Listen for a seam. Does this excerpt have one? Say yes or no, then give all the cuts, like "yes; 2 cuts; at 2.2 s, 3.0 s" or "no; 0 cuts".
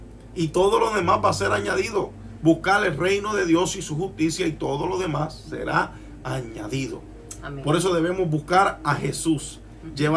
no; 0 cuts